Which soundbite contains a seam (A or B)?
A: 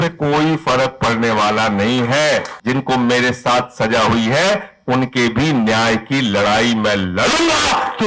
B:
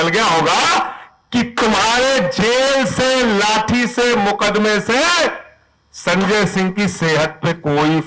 A